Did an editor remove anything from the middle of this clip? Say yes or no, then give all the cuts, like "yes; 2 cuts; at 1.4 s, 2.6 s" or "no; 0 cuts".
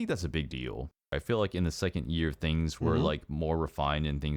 yes; 1 cut; at 1.2 s